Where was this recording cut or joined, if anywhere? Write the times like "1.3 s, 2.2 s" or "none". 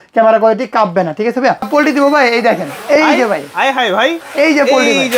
1.7 s, 4.2 s